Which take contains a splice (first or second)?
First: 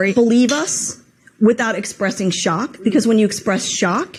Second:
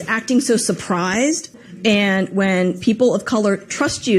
second